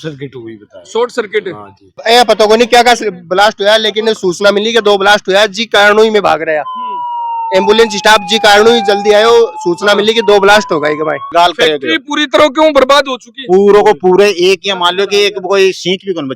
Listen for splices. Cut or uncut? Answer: cut